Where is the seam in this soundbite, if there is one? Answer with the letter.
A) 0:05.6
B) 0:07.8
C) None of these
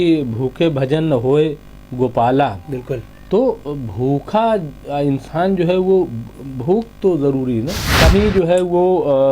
B